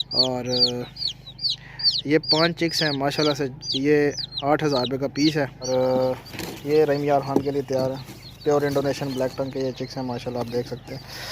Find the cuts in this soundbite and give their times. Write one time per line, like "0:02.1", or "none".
0:05.7

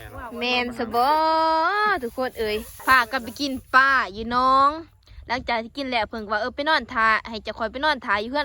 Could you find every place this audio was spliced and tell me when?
0:02.7

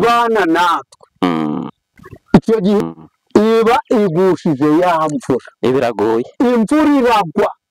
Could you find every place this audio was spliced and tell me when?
0:02.8

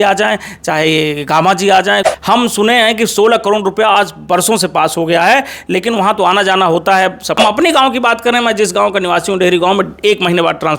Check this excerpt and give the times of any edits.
0:02.1
0:07.4

